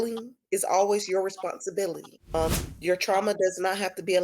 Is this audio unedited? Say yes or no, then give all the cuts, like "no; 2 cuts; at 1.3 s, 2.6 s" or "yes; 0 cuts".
no; 1 cut; at 2.1 s